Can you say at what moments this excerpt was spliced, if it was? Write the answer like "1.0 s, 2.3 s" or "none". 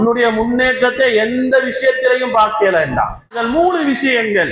3.4 s